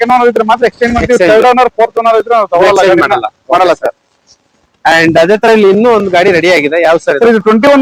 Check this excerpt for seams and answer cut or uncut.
uncut